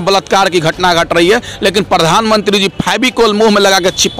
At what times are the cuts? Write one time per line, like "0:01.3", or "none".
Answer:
none